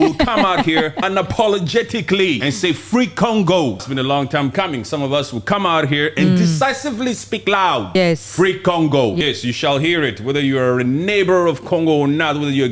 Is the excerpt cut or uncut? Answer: cut